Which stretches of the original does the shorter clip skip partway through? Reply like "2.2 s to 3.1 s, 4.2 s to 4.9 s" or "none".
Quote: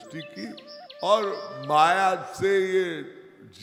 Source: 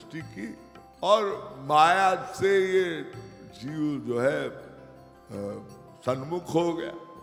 none